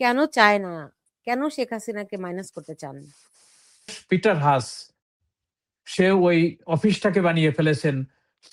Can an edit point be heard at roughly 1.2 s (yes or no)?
no